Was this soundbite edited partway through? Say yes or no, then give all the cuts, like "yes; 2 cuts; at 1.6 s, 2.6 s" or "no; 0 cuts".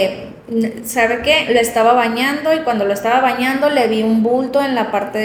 no; 0 cuts